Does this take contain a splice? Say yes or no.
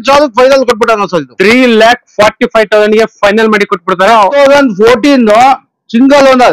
yes